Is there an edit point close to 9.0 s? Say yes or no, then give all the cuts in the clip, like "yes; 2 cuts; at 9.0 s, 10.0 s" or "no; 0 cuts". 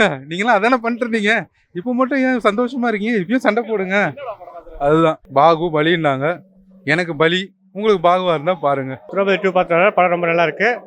yes; 2 cuts; at 5.2 s, 9.0 s